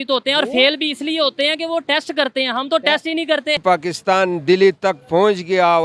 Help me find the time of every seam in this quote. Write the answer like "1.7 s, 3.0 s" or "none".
3.6 s